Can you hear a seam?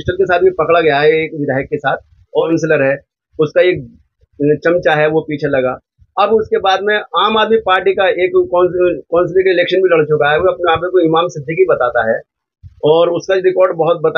yes; 1 cut; at 2.4 s

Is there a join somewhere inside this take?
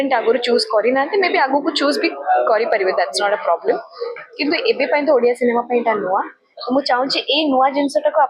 no; 0 cuts

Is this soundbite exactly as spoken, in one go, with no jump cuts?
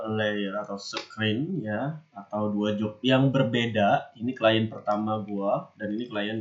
yes; 0 cuts

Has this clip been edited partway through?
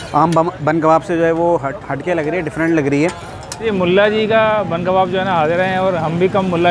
yes; 1 cut; at 3.6 s

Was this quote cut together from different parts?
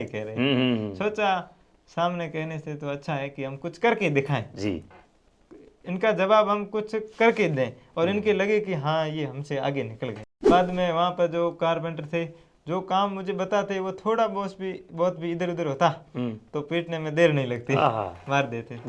yes; 1 cut; at 10.5 s

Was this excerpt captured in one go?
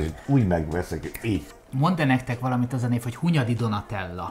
no; 1 cut; at 1.5 s

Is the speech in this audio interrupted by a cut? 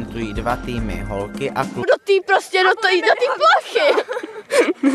no; 0 cuts

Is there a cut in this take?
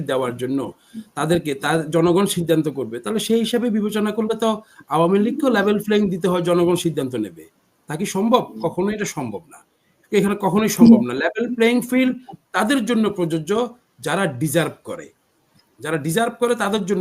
no; 0 cuts

